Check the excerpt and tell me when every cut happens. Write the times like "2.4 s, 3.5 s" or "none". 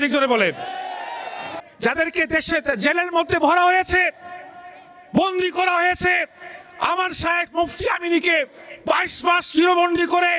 1.5 s